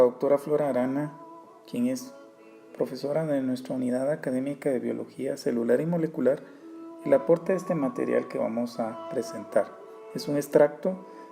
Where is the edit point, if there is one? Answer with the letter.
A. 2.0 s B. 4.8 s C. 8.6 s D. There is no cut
B